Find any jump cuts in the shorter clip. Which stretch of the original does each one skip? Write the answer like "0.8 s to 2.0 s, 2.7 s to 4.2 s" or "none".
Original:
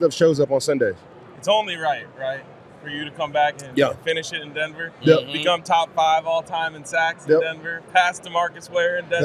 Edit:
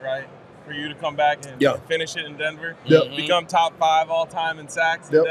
none

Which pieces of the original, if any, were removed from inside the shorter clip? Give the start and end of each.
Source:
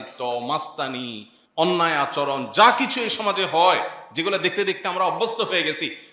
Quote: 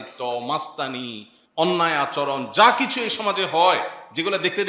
none

